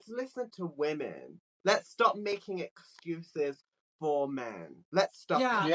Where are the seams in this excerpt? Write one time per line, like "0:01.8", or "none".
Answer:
none

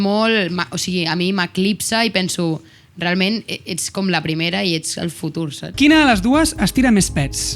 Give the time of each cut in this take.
0:05.6

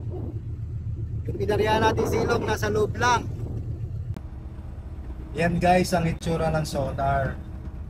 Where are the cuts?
0:04.1

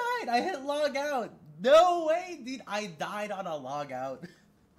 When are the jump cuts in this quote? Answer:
none

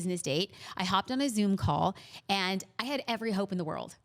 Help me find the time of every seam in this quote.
none

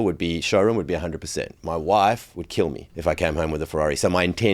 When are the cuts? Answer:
0:02.9

